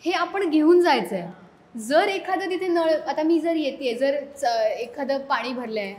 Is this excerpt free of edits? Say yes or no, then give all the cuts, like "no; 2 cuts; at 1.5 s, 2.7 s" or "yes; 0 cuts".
yes; 0 cuts